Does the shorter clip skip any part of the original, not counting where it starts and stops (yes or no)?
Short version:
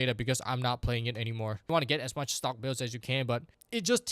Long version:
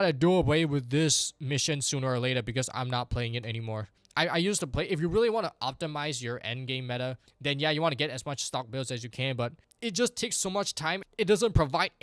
yes